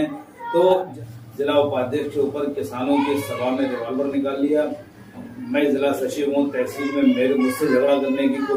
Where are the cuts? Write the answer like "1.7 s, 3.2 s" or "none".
1.0 s